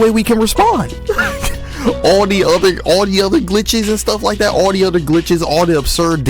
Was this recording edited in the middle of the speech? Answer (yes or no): yes